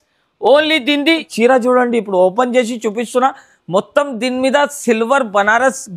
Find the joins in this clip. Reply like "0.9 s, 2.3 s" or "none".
1.3 s